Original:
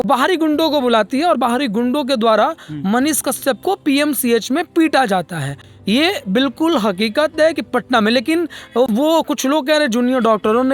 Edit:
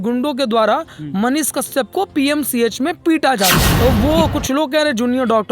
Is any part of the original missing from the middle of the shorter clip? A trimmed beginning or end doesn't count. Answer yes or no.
yes